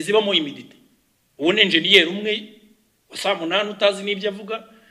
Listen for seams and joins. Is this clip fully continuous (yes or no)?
yes